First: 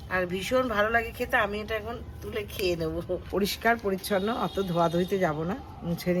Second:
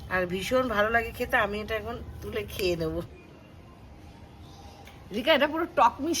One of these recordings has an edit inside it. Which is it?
second; 2 cuts; at 3.1 s, 4.9 s

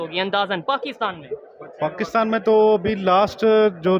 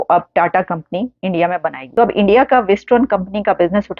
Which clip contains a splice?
second; 1 cut; at 1.8 s

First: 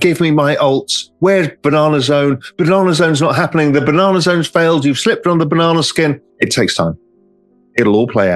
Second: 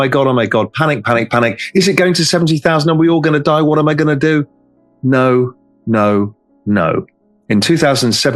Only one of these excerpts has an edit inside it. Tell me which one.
first; 1 cut; at 6.3 s

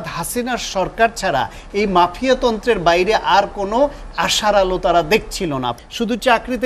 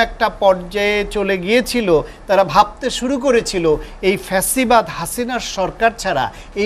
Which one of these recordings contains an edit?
first; 1 cut; at 5.7 s

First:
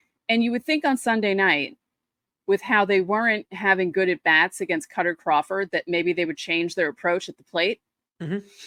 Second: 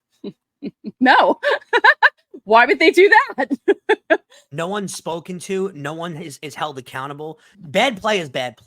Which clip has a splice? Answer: second; 1 cut; at 7.4 s

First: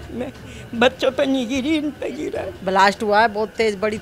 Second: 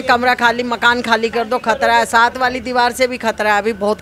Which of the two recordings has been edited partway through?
first; 1 cut; at 2.5 s

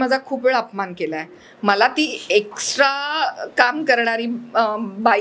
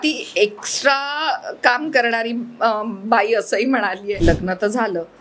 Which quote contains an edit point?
second; 1 cut; at 4.2 s

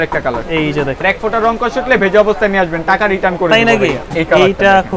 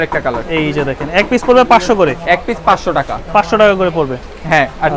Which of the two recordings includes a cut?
first; 2 cuts; at 1.0 s, 4.0 s

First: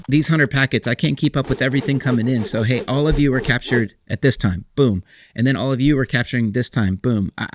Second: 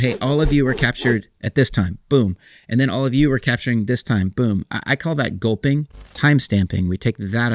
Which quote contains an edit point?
second; 1 cut; at 6.1 s

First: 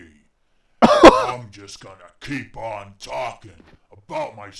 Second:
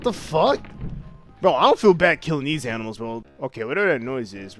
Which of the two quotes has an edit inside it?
second; 1 cut; at 3.2 s

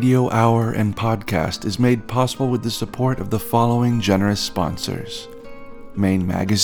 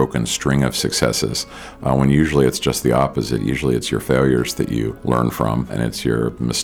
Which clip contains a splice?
second; 2 cuts; at 5.0 s, 5.7 s

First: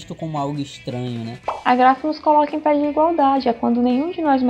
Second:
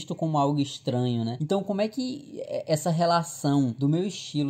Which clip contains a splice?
first; 1 cut; at 1.5 s

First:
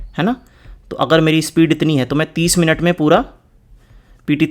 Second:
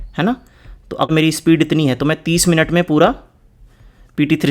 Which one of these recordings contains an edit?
second; 1 cut; at 1.1 s

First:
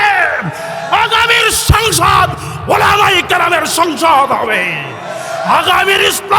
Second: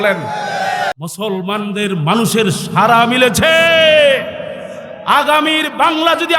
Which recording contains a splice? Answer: second; 1 cut; at 1.0 s

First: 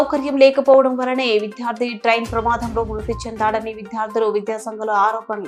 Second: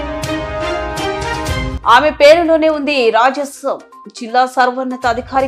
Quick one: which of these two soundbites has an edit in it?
second; 1 cut; at 1.7 s

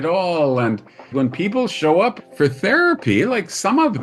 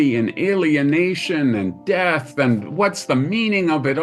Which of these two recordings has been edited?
first; 2 cuts; at 1.1 s, 2.2 s

